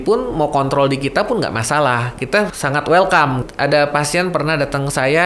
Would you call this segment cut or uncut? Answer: cut